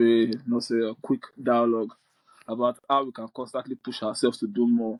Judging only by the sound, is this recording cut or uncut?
uncut